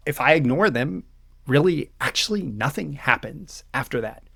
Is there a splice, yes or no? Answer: no